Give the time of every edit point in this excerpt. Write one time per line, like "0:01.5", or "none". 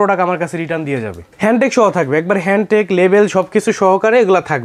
none